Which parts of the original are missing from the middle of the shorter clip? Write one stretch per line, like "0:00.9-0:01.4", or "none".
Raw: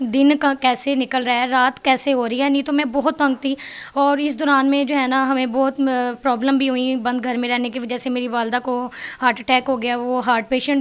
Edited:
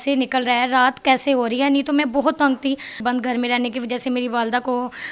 0:03.8-0:07.0